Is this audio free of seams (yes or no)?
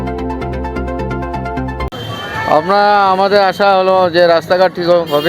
no